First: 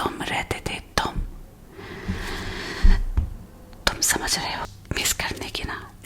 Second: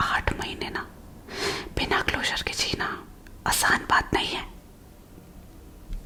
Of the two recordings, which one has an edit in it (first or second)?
first